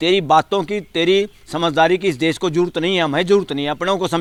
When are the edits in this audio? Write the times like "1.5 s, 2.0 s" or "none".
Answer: none